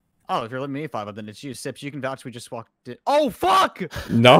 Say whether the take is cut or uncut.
uncut